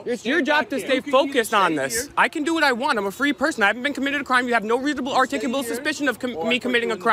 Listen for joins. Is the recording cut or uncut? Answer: uncut